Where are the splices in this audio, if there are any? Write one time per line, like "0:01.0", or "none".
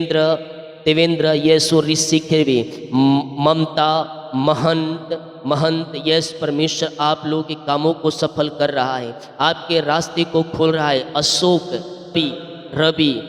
0:12.1